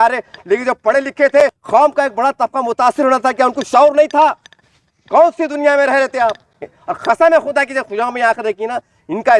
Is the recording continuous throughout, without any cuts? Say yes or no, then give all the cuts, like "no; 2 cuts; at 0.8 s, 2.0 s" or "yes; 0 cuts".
no; 2 cuts; at 1.4 s, 6.5 s